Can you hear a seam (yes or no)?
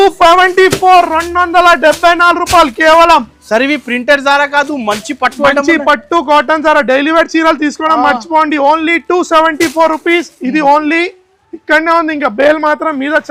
no